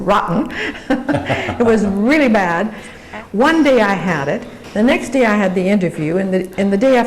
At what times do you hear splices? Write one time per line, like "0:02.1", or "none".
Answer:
0:03.0